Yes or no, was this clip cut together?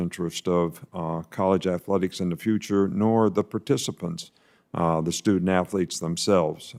no